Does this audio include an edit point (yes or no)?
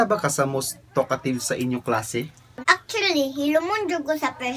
no